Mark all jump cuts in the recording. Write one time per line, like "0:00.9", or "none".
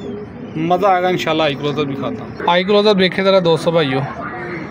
0:02.3

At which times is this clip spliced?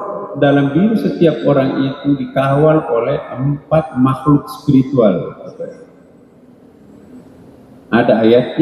none

